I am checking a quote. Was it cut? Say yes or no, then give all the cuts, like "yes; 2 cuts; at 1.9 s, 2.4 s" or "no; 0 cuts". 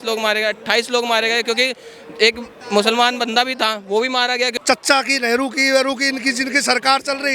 yes; 1 cut; at 4.5 s